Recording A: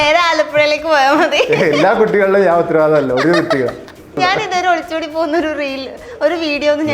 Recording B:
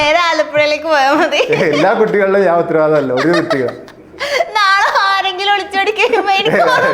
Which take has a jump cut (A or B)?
A